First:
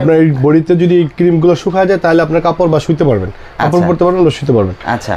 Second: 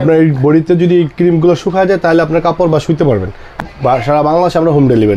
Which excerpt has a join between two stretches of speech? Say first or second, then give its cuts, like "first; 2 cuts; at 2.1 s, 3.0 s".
second; 1 cut; at 3.7 s